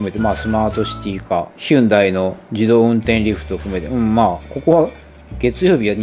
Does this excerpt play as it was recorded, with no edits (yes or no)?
yes